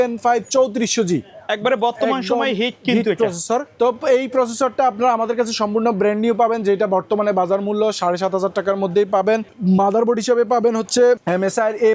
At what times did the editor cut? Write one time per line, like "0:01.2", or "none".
none